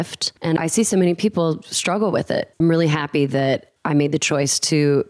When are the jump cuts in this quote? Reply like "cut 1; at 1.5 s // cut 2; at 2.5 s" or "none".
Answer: cut 1; at 2.5 s // cut 2; at 3.7 s